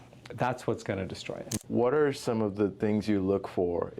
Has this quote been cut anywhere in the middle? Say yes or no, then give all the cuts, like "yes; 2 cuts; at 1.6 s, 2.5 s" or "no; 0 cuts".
yes; 2 cuts; at 1.6 s, 2.8 s